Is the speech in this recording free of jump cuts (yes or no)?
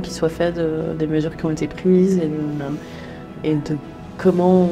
yes